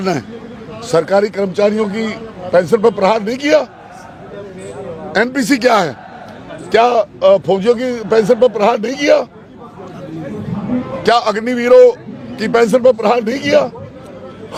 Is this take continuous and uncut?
yes; 0 cuts

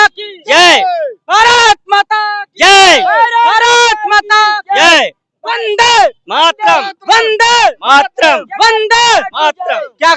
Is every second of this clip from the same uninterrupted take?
yes; 0 cuts

